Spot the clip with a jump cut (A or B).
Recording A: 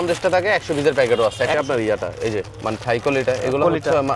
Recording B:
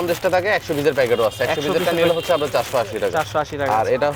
A